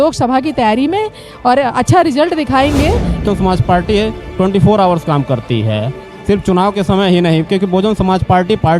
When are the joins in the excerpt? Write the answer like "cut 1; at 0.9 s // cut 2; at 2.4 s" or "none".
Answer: cut 1; at 3.2 s